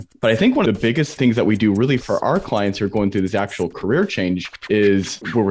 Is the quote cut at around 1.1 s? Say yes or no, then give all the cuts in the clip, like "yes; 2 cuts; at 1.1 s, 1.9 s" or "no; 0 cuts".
yes; 1 cut; at 1.1 s